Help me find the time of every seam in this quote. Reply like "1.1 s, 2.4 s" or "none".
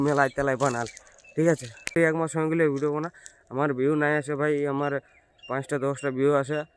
1.9 s